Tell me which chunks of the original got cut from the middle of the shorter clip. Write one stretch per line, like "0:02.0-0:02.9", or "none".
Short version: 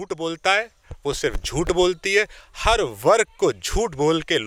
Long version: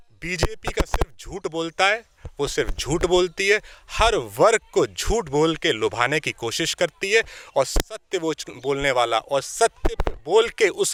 none